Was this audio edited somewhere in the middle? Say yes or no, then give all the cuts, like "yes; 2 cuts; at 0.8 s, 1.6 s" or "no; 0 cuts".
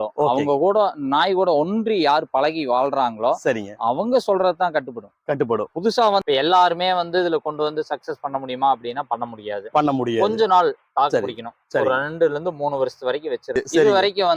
yes; 2 cuts; at 6.2 s, 13.5 s